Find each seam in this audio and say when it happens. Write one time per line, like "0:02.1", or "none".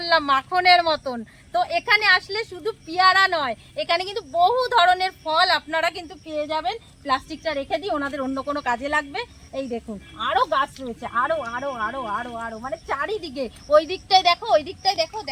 none